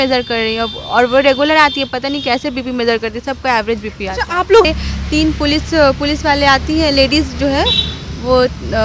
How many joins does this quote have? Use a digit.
1